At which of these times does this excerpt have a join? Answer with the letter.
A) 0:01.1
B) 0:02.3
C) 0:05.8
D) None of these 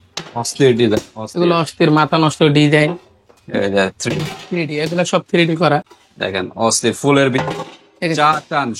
D